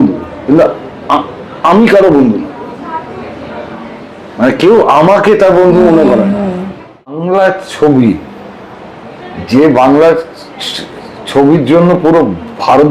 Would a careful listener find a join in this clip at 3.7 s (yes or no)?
no